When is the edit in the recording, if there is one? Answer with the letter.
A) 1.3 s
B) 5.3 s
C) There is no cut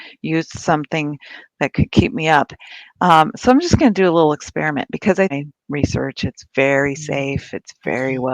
B